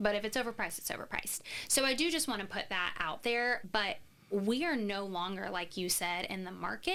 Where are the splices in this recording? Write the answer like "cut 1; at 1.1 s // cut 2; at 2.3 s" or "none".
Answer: none